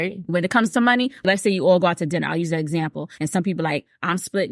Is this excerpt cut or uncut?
cut